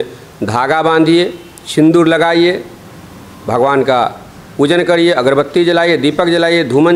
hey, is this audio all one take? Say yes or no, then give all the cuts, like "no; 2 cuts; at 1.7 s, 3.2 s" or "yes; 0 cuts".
yes; 0 cuts